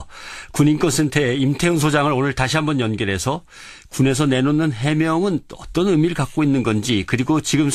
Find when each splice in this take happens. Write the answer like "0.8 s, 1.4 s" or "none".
none